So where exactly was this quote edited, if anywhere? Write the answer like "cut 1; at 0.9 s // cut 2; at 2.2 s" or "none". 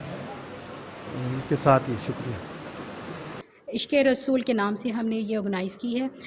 cut 1; at 3.4 s